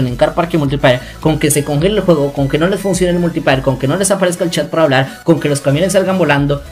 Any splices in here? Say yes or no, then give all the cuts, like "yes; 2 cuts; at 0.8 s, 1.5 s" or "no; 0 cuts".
no; 0 cuts